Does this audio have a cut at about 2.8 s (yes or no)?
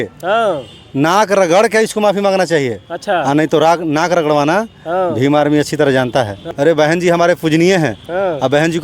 no